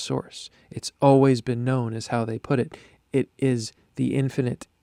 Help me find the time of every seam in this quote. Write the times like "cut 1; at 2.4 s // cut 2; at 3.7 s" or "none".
none